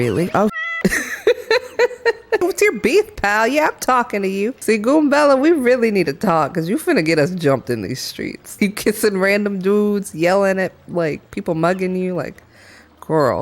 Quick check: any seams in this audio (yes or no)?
yes